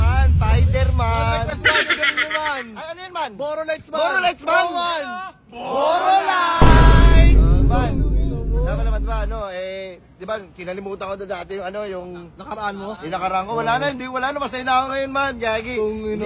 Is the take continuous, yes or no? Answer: yes